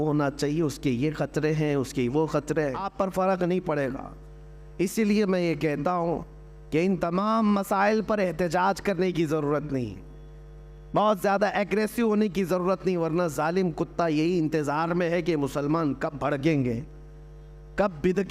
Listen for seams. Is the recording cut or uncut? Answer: cut